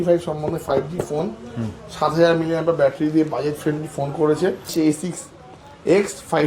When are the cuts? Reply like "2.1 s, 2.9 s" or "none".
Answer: 4.7 s